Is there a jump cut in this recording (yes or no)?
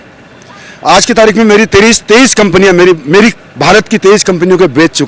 no